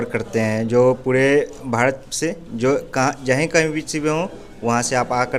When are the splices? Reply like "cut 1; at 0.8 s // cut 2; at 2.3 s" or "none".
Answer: none